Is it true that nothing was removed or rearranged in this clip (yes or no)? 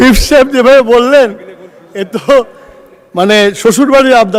yes